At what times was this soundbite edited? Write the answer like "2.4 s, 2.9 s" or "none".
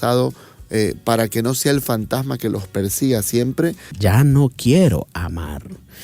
3.9 s

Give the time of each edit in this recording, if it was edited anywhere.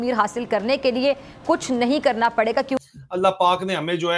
2.8 s

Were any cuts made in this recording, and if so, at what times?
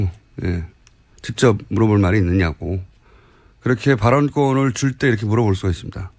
5.1 s

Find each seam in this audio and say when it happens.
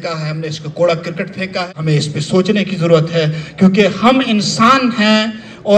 1.7 s

